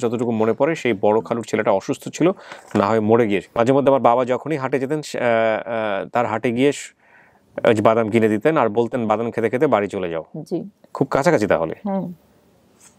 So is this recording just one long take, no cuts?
no; 1 cut; at 3.5 s

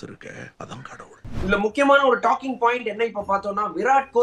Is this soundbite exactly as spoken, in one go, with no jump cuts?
no; 1 cut; at 1.4 s

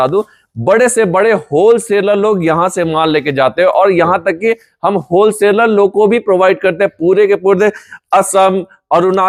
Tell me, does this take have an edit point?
no; 0 cuts

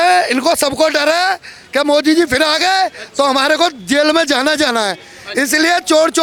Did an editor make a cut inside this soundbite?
no; 0 cuts

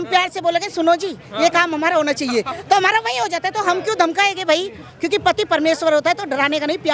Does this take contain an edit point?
no; 0 cuts

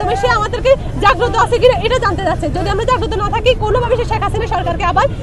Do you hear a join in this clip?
no; 0 cuts

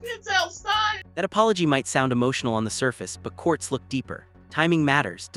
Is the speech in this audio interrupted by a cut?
no; 0 cuts

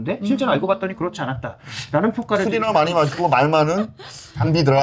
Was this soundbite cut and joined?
no; 0 cuts

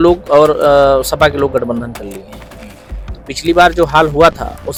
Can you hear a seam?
no; 0 cuts

